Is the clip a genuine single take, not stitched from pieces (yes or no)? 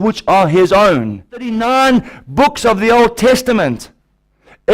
no